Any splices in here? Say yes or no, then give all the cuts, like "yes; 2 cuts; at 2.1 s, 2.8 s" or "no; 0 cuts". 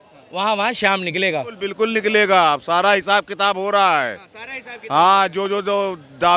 yes; 1 cut; at 1.7 s